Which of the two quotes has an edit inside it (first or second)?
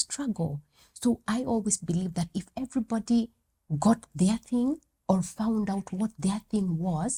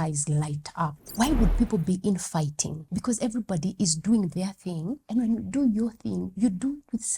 second